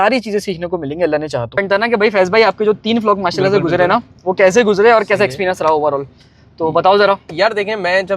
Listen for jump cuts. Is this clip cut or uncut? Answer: cut